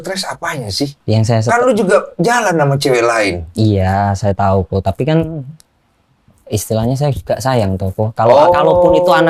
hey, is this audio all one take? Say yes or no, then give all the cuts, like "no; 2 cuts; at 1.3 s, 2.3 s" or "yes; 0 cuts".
no; 1 cut; at 1.0 s